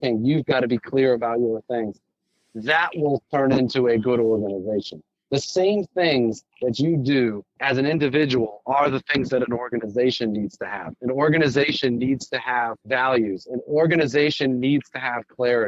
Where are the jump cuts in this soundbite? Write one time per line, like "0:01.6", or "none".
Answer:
0:07.5
0:12.8